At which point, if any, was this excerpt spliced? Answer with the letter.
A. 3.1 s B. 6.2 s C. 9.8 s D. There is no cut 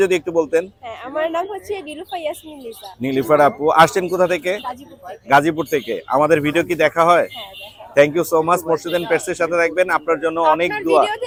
D